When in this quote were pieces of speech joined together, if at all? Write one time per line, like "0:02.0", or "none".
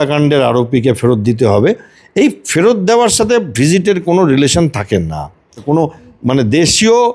0:05.6